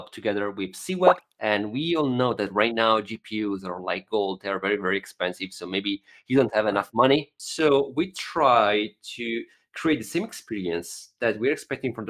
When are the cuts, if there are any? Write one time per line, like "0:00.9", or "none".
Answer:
0:01.3
0:07.3